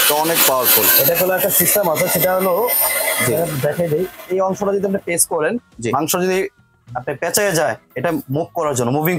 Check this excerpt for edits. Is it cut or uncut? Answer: uncut